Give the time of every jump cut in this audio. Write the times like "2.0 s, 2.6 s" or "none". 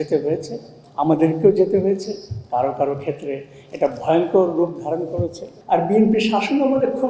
5.5 s

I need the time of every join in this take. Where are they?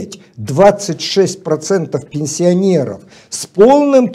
none

